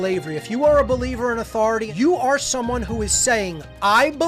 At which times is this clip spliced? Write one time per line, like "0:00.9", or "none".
0:01.9